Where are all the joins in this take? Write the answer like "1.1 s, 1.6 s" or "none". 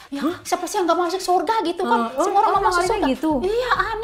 none